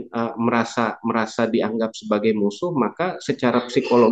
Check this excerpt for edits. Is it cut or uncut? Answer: uncut